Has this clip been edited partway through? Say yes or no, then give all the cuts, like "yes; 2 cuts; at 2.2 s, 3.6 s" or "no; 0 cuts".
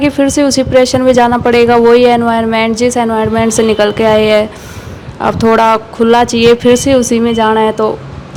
no; 0 cuts